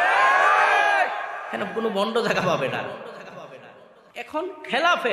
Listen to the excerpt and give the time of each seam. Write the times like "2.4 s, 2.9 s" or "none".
4.1 s